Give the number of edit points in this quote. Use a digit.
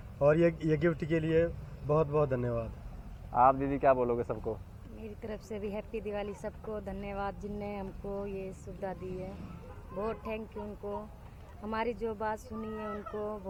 0